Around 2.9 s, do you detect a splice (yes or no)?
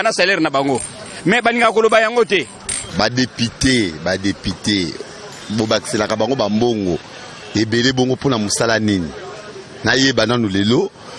yes